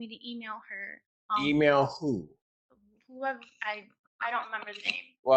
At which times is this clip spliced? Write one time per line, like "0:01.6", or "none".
none